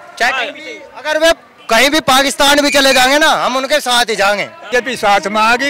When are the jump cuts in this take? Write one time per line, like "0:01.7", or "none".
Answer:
0:04.6